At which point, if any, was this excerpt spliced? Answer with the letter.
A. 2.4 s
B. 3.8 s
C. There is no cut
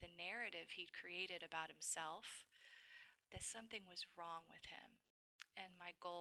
C